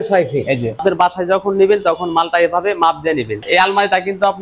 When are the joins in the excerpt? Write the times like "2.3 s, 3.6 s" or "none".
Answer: 0.8 s, 3.3 s